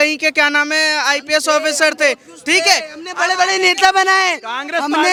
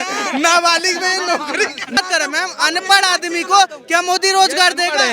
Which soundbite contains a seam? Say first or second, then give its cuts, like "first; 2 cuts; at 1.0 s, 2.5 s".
second; 1 cut; at 2.0 s